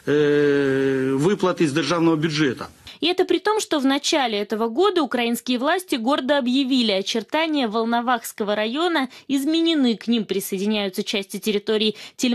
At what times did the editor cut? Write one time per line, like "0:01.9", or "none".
0:04.0